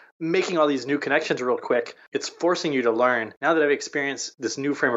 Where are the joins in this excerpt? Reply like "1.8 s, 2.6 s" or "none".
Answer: 2.0 s, 3.3 s